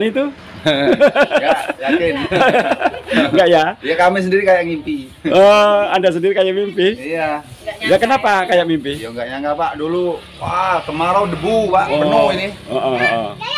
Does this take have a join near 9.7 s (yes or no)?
no